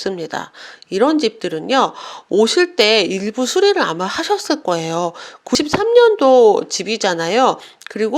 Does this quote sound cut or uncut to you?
cut